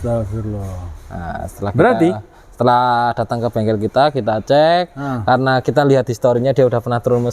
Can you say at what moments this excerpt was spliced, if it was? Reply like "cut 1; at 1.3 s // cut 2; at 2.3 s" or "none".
none

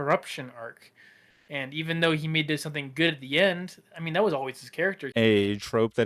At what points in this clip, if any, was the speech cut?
cut 1; at 5.0 s

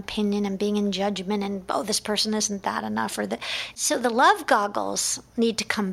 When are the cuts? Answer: cut 1; at 3.6 s

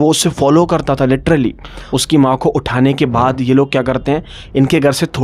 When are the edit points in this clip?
cut 1; at 1.7 s

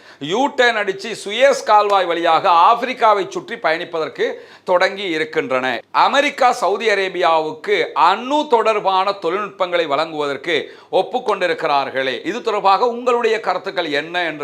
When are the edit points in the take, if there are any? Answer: cut 1; at 5.8 s

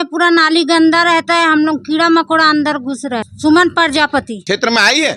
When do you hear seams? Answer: cut 1; at 3.3 s // cut 2; at 4.3 s

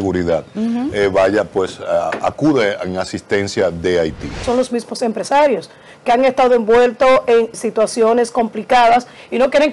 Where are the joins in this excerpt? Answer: cut 1; at 4.4 s // cut 2; at 7.5 s

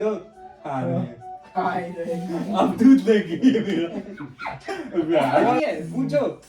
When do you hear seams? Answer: cut 1; at 5.6 s

